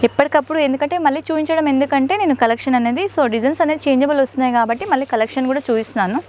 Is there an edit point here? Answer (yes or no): no